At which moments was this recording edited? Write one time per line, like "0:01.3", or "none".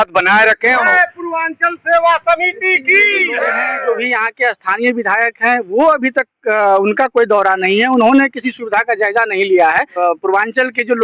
0:00.8
0:03.7
0:10.0